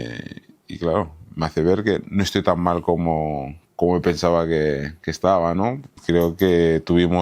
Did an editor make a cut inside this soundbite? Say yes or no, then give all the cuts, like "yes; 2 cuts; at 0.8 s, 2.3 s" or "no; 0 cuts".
yes; 1 cut; at 5.9 s